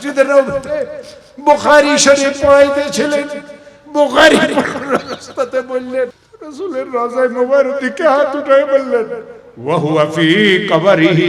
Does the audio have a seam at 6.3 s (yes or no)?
yes